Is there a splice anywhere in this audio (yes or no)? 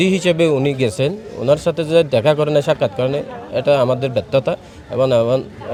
no